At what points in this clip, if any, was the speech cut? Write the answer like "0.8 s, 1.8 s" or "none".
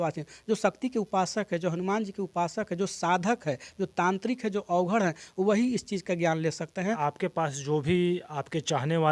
7.0 s